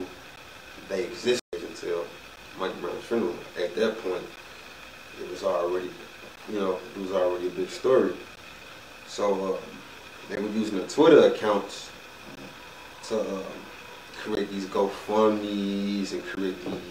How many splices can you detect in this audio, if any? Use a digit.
1